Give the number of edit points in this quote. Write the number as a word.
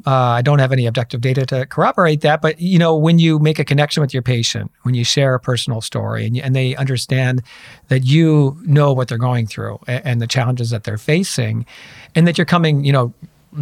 zero